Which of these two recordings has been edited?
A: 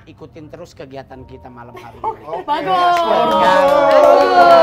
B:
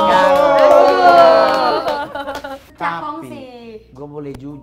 B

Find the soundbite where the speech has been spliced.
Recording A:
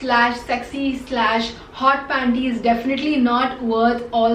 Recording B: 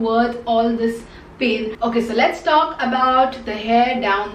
B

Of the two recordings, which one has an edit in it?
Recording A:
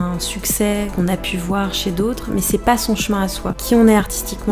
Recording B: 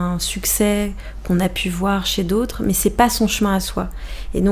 A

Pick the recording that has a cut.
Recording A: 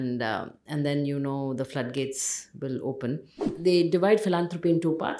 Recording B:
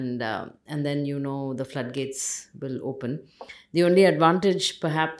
A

